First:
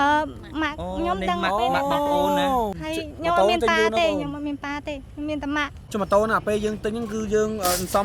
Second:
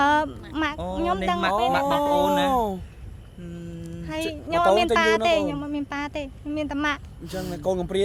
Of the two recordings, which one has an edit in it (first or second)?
first